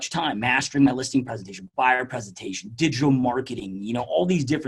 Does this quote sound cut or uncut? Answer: uncut